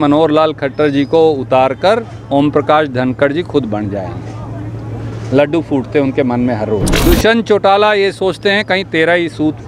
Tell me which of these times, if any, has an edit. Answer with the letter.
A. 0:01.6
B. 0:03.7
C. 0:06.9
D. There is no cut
C